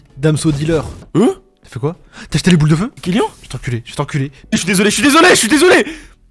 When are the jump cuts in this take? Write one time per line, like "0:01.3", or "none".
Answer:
0:01.0